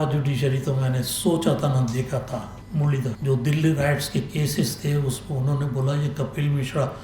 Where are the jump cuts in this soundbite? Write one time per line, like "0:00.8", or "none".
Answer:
0:02.7